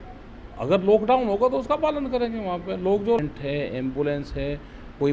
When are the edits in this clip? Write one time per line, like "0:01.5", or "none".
0:03.2

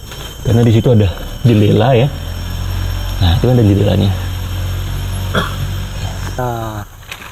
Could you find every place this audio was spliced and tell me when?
0:06.4

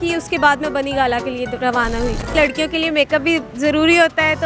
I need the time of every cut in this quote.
0:02.3

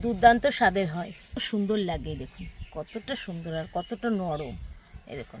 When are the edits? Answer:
0:01.4

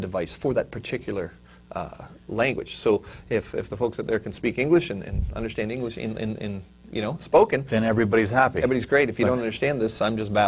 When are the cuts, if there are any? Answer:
none

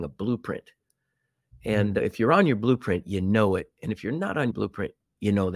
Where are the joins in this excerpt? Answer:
0:04.5

